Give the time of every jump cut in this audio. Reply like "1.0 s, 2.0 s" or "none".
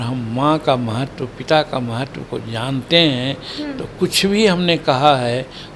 none